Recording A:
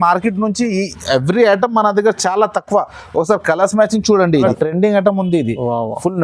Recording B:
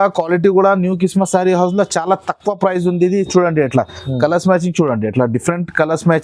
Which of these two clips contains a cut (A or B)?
A